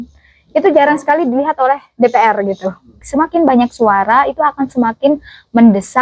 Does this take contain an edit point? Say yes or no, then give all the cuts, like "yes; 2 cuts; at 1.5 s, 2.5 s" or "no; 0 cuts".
yes; 1 cut; at 3.0 s